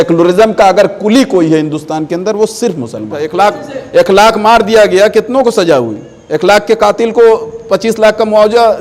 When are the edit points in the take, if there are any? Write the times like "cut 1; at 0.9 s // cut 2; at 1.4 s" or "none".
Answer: cut 1; at 3.3 s